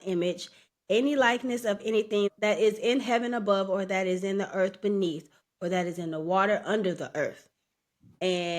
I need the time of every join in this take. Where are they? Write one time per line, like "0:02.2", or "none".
0:02.3